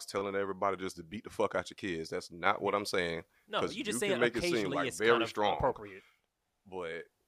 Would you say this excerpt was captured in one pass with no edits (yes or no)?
yes